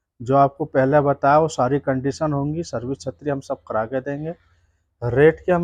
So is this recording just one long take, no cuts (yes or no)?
yes